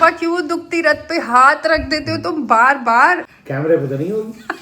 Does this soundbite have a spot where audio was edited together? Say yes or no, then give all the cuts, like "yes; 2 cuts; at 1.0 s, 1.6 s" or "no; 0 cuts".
yes; 1 cut; at 3.3 s